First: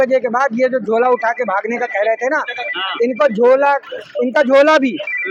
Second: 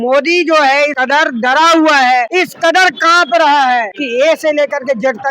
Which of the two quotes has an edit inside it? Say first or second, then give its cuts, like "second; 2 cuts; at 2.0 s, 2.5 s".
second; 3 cuts; at 1.0 s, 2.3 s, 4.0 s